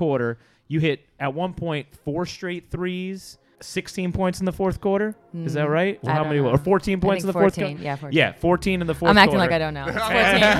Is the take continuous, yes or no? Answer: no